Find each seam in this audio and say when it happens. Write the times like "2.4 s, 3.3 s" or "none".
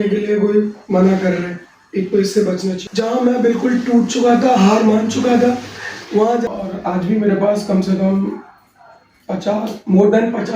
2.8 s, 6.5 s